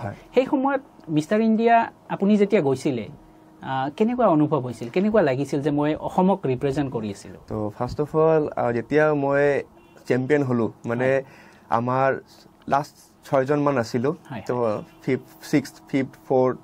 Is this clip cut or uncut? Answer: uncut